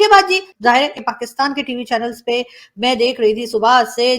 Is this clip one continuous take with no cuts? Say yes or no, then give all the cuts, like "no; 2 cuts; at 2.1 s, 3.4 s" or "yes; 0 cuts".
no; 1 cut; at 1.0 s